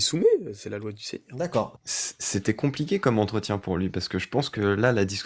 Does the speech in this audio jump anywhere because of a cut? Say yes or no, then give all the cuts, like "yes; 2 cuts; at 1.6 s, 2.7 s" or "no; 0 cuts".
yes; 1 cut; at 1.8 s